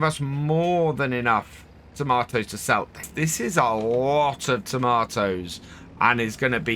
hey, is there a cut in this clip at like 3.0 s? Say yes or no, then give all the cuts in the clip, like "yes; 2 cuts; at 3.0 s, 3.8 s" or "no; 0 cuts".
yes; 1 cut; at 3.0 s